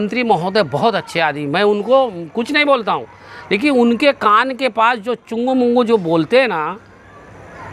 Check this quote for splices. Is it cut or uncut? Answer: uncut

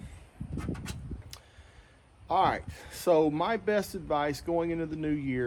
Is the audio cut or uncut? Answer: uncut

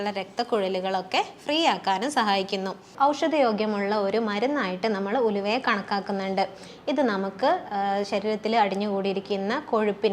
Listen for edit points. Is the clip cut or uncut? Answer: cut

